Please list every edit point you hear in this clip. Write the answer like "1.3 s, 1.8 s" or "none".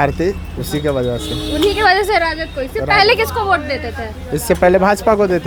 none